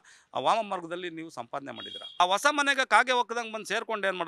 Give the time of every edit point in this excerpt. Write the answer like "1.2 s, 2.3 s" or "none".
2.2 s